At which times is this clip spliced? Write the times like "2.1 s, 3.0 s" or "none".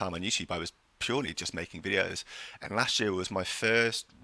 none